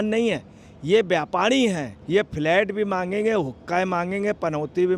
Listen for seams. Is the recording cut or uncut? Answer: cut